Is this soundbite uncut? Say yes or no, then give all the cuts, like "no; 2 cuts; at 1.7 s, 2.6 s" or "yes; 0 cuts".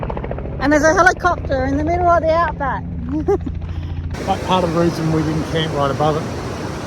no; 1 cut; at 4.1 s